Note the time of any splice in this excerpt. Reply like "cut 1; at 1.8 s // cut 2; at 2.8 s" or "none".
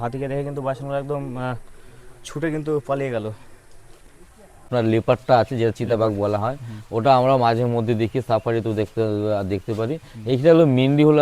cut 1; at 4.7 s